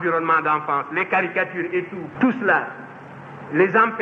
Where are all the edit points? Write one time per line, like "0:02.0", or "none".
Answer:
0:02.0